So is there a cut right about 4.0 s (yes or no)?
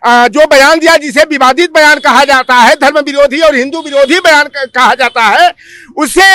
no